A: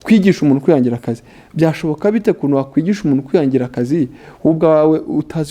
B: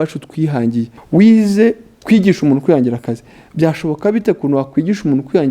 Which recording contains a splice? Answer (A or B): B